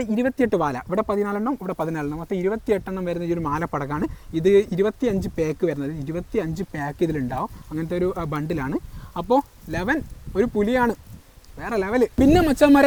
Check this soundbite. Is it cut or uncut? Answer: uncut